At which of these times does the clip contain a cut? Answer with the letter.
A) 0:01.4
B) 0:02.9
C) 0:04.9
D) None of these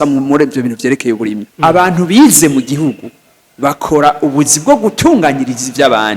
A